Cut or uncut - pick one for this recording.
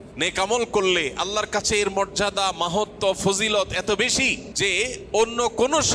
cut